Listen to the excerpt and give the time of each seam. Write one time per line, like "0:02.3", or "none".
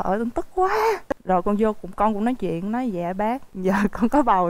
0:01.1